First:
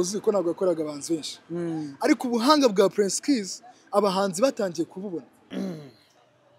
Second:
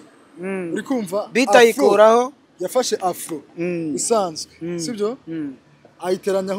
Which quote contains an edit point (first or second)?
first